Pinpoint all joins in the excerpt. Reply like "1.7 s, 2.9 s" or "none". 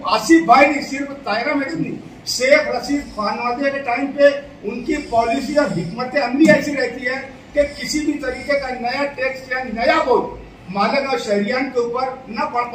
none